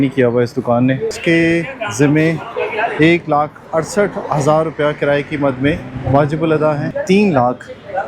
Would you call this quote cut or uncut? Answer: cut